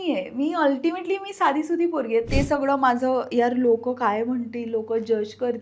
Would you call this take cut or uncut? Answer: cut